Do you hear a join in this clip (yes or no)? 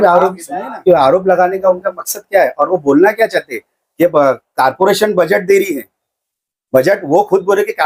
no